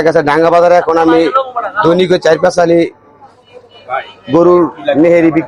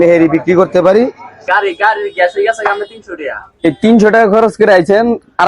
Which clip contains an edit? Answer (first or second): second